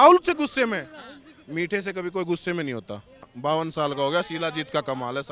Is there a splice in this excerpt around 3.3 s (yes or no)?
yes